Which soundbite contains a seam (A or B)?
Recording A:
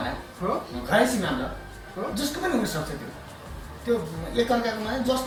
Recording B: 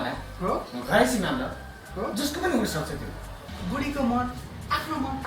B